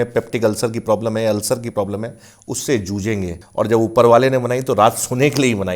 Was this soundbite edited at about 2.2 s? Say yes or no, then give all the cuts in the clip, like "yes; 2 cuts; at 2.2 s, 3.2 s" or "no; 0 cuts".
no; 1 cut; at 3.4 s